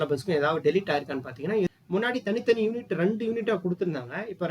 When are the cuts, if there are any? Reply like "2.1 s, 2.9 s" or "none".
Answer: 1.7 s